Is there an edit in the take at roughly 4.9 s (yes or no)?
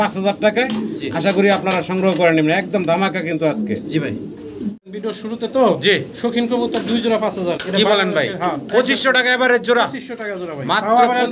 yes